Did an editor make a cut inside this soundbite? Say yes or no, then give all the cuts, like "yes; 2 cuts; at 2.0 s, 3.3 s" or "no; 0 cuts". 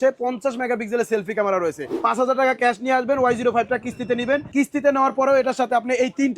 yes; 2 cuts; at 1.9 s, 4.5 s